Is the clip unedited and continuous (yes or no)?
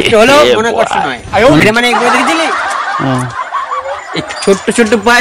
no